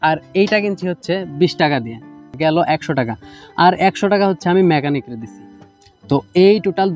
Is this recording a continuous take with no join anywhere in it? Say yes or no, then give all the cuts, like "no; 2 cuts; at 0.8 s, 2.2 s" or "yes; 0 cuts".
yes; 0 cuts